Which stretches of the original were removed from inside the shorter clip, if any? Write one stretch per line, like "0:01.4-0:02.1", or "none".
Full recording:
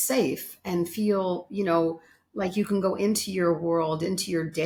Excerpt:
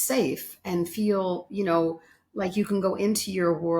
none

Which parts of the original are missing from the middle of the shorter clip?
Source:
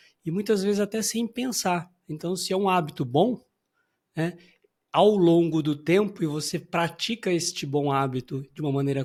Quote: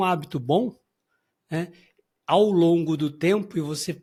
none

